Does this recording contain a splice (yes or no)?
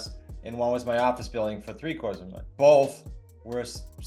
yes